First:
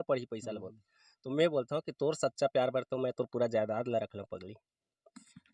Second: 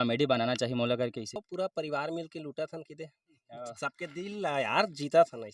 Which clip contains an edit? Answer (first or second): second